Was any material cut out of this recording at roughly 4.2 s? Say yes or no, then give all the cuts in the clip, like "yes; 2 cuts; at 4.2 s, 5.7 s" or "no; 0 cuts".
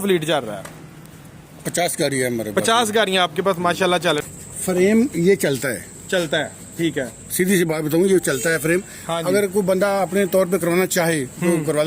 yes; 1 cut; at 4.2 s